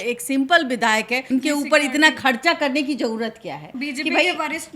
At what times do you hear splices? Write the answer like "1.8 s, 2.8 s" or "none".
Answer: 3.7 s

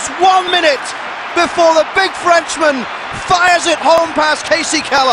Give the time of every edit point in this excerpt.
none

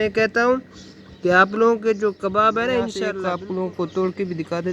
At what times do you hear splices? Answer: 3.1 s

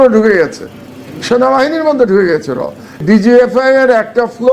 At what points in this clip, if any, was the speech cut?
3.0 s

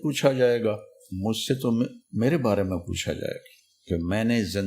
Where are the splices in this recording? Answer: 2.0 s

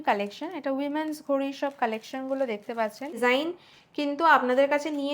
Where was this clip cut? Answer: 3.2 s

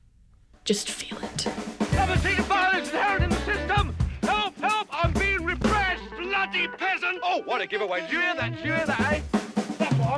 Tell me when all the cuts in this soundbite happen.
1.2 s

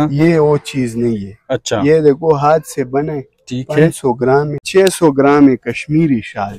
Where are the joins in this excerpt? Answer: 4.6 s

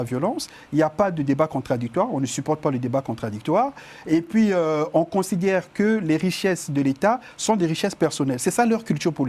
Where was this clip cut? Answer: none

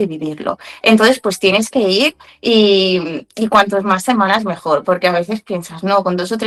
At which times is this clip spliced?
none

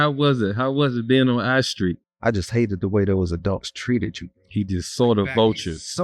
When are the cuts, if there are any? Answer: 2.1 s

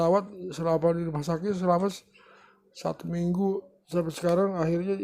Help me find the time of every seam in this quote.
3.8 s

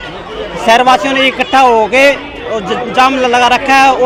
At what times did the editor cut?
none

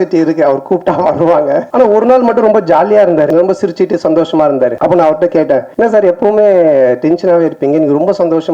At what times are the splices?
1.7 s, 3.3 s, 4.8 s, 5.7 s

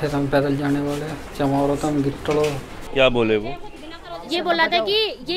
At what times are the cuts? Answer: 2.7 s

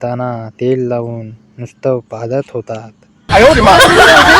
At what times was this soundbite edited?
3.2 s

